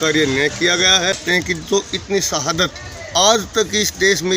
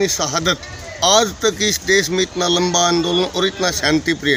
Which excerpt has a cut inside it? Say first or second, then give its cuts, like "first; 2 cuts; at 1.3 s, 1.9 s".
first; 1 cut; at 1.2 s